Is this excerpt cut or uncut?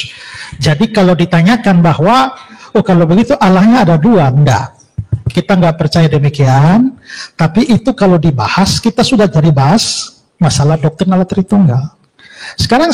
uncut